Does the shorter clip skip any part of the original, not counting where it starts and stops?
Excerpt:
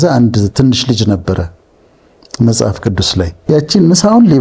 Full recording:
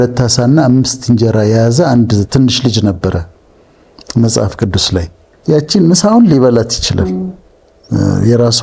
yes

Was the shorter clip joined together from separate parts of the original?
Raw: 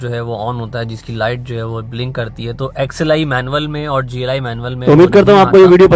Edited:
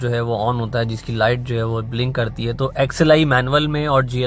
no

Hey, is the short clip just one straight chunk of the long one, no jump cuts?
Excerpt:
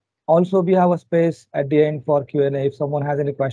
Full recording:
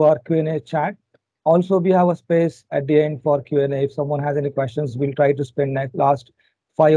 yes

